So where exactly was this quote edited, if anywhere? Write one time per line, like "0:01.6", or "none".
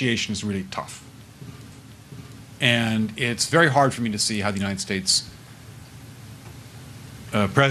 0:01.3